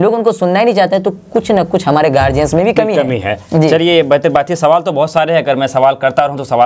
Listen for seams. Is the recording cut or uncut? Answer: uncut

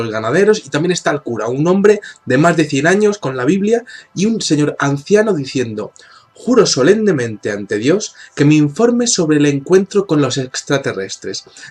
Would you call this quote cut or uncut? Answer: cut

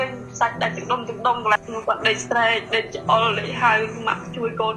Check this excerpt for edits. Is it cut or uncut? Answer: cut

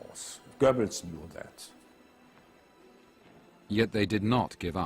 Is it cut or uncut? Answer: uncut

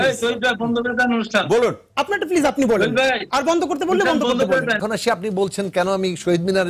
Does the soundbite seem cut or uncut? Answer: cut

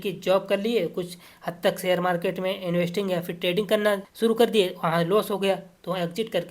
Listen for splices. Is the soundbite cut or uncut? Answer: cut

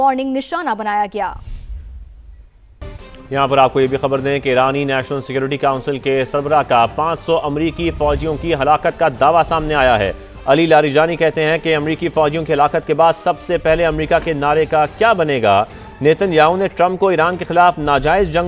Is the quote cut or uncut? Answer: cut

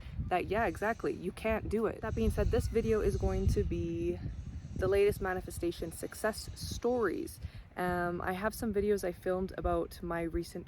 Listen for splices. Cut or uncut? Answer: cut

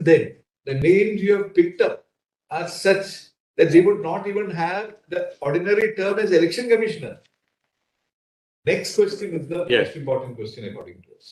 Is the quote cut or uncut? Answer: uncut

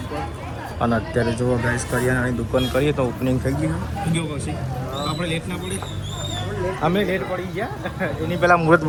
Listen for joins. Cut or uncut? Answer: uncut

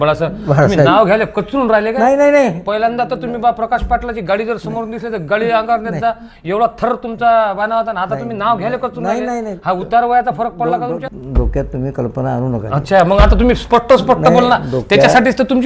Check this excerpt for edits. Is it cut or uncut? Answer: uncut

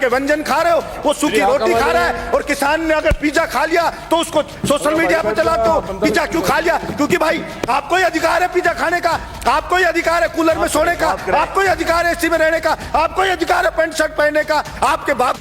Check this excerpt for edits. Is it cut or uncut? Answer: uncut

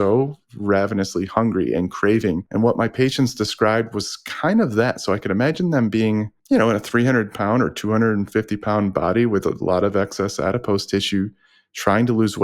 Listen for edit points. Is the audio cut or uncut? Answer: cut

